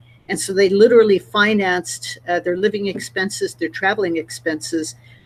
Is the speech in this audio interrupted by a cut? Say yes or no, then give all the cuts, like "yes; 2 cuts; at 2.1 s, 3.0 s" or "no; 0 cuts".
no; 0 cuts